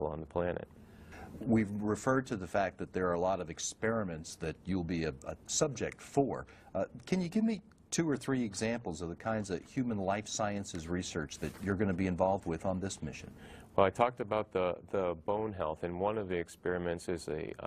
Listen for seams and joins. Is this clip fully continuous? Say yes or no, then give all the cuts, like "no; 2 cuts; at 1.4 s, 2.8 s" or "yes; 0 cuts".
no; 1 cut; at 7.3 s